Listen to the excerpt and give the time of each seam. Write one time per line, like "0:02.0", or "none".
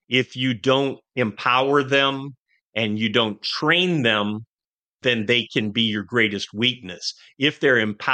0:04.9